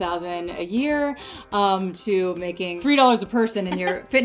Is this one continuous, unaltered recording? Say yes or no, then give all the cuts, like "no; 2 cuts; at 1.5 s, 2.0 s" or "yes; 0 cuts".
no; 1 cut; at 2.7 s